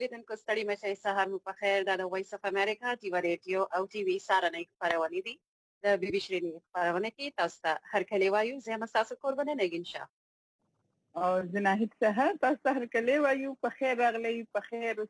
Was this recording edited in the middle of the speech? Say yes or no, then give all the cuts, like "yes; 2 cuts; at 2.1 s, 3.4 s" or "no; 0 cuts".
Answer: yes; 1 cut; at 1.2 s